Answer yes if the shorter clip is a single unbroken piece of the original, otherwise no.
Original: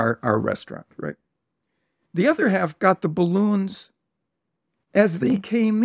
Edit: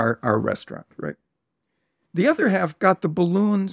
yes